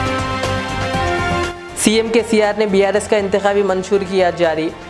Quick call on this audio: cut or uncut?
uncut